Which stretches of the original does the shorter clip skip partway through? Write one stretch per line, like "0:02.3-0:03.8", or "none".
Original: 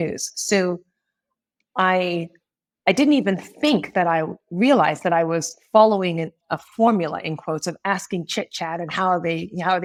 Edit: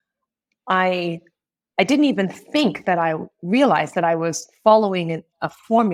none